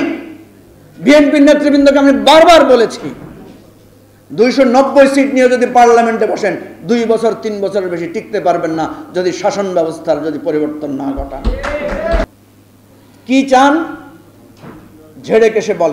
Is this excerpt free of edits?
no; 1 cut; at 12.3 s

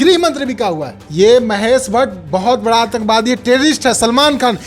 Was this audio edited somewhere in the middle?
yes; 1 cut; at 1.0 s

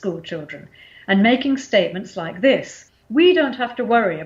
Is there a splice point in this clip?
yes; 1 cut; at 3.0 s

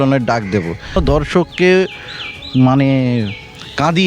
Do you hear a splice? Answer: yes; 1 cut; at 1.0 s

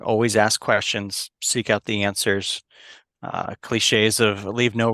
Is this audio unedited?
yes; 0 cuts

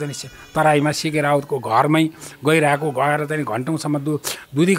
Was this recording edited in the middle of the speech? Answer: no; 0 cuts

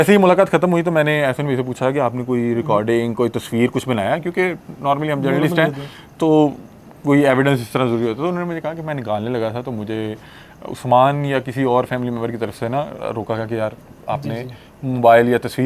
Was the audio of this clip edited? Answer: no; 0 cuts

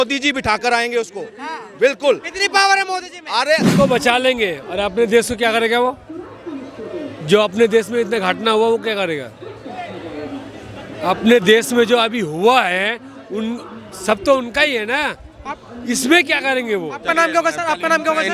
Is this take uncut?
no; 1 cut; at 3.7 s

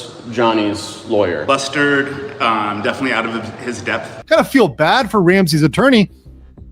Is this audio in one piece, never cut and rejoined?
no; 1 cut; at 4.2 s

